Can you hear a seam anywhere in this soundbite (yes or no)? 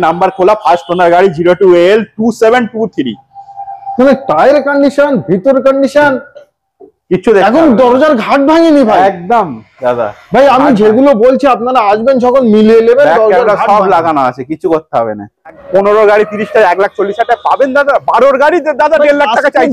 yes